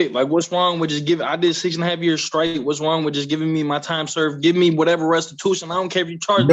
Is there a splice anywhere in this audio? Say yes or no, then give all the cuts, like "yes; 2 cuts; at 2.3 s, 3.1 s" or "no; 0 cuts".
no; 0 cuts